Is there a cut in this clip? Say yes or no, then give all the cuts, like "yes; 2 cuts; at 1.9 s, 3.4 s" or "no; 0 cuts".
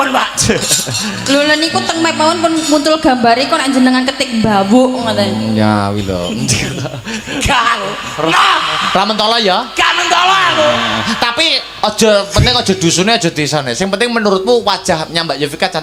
no; 0 cuts